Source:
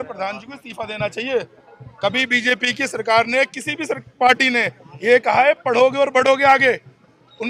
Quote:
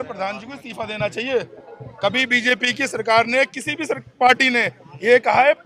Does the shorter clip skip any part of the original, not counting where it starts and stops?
no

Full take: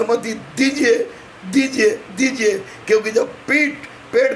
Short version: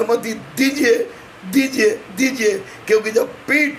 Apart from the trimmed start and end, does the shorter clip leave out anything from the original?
no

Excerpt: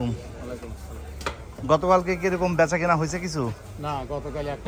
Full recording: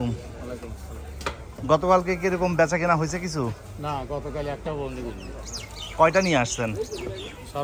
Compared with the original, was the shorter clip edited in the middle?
no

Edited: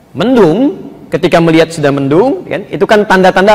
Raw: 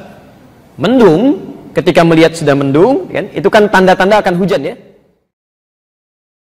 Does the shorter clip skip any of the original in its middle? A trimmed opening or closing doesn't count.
no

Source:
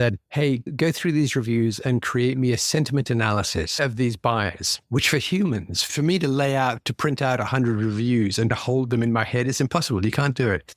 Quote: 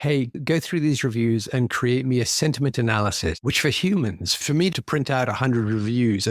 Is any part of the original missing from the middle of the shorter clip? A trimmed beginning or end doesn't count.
yes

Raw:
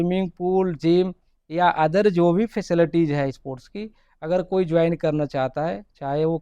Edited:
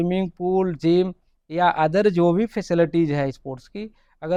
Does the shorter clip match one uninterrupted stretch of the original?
yes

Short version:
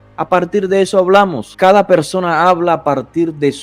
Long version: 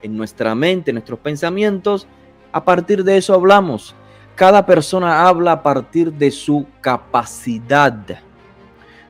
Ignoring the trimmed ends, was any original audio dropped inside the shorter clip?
yes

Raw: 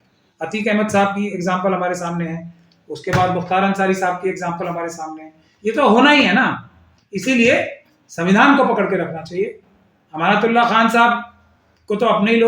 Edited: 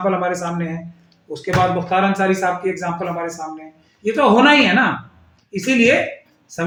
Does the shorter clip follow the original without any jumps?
yes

